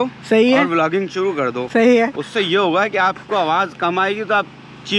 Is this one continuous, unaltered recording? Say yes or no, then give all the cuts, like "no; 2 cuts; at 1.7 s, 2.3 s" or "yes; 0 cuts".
yes; 0 cuts